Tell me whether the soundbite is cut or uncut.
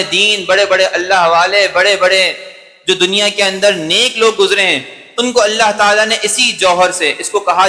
uncut